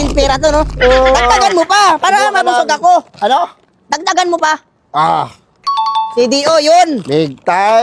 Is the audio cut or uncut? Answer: uncut